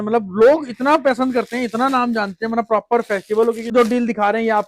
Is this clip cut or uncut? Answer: cut